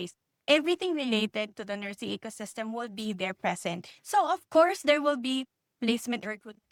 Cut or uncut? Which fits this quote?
uncut